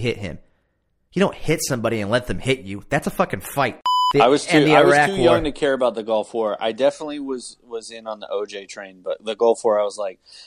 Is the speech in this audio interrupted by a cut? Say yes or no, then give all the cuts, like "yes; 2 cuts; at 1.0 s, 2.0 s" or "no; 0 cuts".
yes; 1 cut; at 3.9 s